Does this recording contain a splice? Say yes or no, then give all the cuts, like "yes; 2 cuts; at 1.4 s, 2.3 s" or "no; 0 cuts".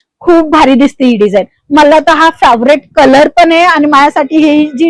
no; 0 cuts